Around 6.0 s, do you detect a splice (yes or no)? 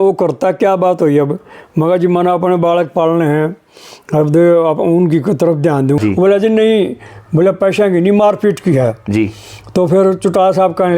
yes